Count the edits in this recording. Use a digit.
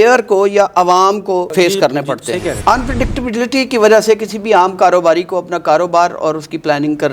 2